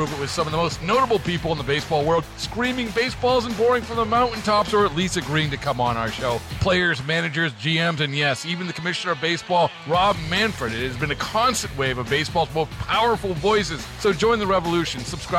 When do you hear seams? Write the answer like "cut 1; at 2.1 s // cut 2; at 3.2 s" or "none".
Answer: none